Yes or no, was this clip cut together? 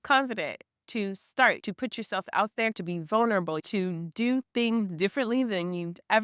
yes